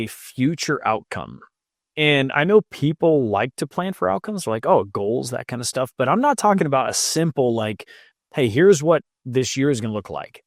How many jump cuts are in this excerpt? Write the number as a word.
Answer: zero